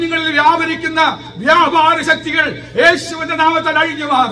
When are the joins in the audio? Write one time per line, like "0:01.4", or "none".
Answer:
none